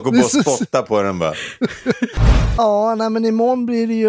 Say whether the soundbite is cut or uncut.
cut